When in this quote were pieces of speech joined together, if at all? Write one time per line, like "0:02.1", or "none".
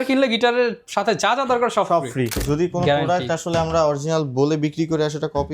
0:02.4